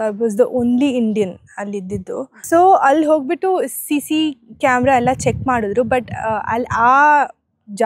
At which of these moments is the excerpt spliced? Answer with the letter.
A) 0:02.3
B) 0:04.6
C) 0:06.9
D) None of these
A